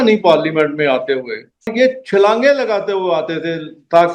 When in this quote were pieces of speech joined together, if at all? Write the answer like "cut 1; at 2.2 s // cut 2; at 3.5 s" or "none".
cut 1; at 1.7 s